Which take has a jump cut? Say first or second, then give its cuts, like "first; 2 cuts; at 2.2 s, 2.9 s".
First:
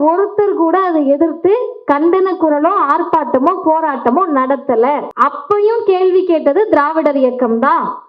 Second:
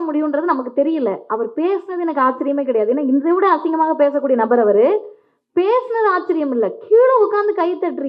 first; 1 cut; at 5.1 s